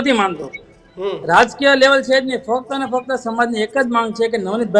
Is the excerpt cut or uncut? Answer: uncut